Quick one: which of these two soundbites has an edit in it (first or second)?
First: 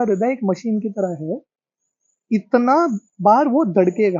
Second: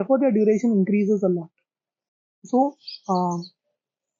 second